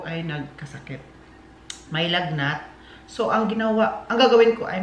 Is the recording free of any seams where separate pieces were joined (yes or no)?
yes